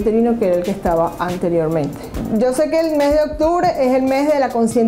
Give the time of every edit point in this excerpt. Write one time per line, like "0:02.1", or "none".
0:02.1

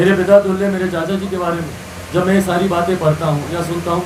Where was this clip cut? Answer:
none

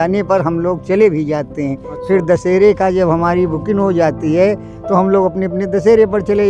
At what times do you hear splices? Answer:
none

